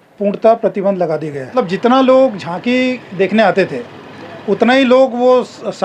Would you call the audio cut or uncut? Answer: cut